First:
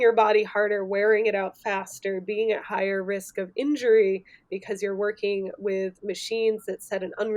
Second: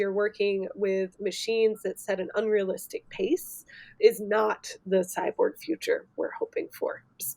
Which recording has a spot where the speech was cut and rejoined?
second; 1 cut; at 4.0 s

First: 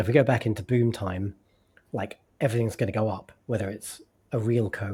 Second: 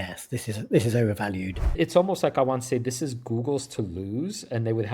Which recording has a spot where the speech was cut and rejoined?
second; 1 cut; at 1.8 s

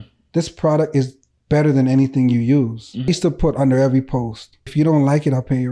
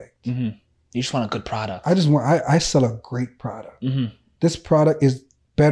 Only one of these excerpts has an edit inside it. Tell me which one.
first; 2 cuts; at 3.1 s, 4.7 s

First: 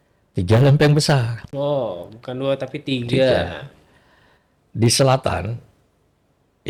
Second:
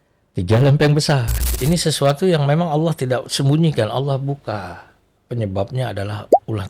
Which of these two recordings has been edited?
second; 1 cut; at 1.5 s

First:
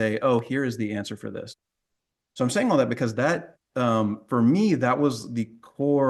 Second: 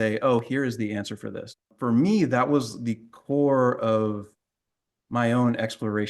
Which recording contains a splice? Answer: second; 1 cut; at 1.7 s

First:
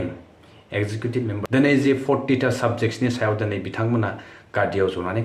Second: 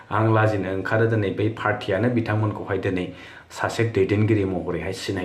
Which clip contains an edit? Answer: first; 1 cut; at 1.4 s

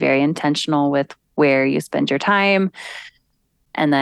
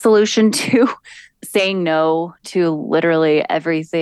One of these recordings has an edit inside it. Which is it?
second; 1 cut; at 1.3 s

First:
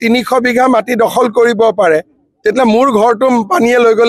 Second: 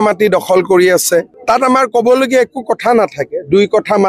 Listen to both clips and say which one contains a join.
second; 1 cut; at 1.3 s

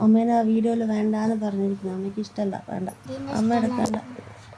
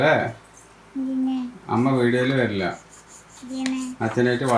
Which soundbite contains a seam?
first; 1 cut; at 3.0 s

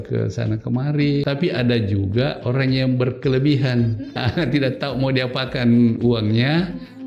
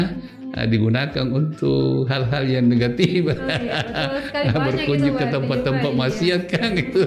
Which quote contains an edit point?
first; 2 cuts; at 1.2 s, 4.1 s

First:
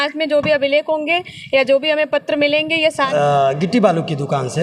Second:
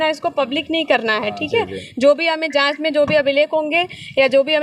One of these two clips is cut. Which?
first; 1 cut; at 3.1 s

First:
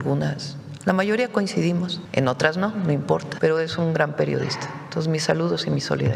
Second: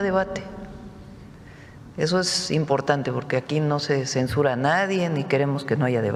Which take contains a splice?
first; 2 cuts; at 2.0 s, 3.3 s

